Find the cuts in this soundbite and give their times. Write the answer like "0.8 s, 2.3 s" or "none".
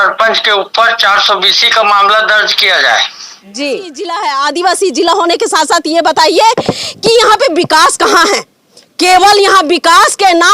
4.1 s